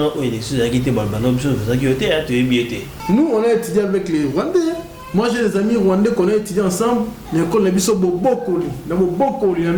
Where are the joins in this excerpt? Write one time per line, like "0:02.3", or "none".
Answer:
0:02.9

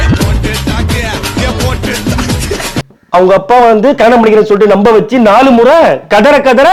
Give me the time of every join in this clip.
0:02.9

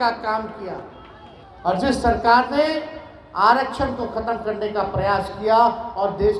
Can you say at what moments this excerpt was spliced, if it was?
none

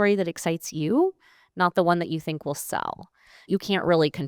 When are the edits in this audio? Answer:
none

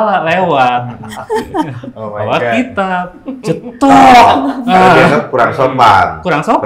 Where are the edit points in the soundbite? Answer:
none

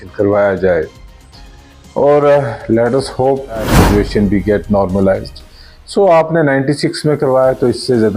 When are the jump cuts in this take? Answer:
0:03.7

